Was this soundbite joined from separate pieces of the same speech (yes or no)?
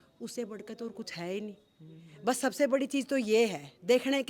no